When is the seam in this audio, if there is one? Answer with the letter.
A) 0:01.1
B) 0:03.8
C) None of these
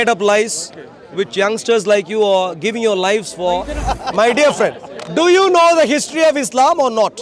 B